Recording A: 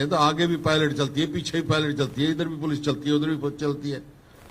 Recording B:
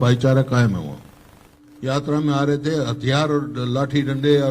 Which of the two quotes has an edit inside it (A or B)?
B